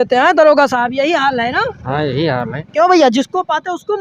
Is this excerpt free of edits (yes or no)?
yes